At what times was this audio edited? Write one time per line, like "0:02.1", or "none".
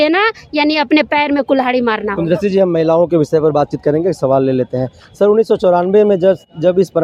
none